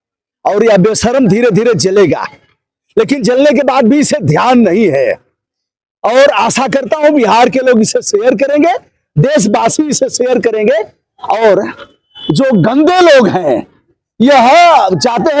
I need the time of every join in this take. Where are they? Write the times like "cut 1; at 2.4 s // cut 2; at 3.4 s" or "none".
none